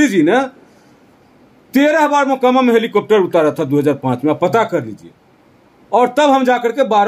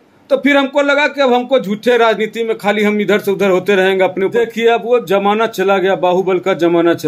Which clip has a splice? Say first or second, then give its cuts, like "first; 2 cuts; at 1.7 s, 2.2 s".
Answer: second; 1 cut; at 4.3 s